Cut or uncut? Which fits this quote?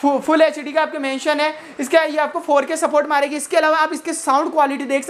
uncut